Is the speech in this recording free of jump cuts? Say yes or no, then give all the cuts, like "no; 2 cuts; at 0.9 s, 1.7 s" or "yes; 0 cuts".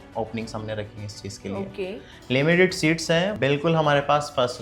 no; 1 cut; at 3.4 s